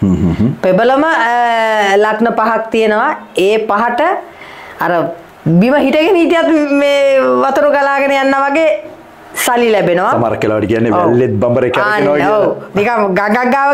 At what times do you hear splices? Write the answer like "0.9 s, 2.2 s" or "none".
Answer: none